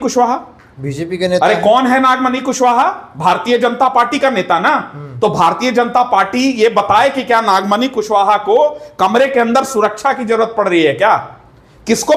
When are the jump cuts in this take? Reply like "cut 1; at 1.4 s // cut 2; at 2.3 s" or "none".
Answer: none